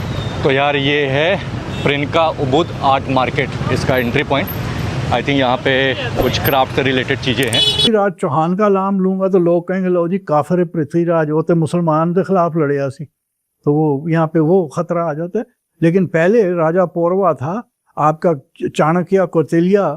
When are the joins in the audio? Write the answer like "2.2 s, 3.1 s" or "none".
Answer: 7.8 s